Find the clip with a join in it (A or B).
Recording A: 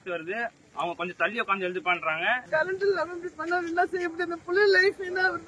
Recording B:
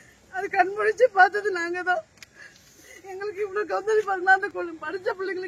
A